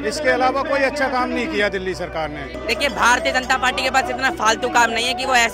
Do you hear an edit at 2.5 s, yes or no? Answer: yes